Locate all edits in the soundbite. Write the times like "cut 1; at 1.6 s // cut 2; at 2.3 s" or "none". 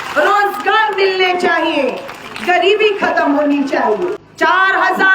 cut 1; at 4.2 s